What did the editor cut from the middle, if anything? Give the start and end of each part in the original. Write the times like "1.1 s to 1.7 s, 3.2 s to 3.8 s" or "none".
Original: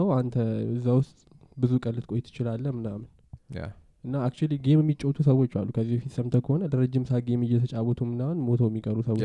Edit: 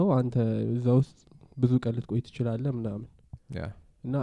none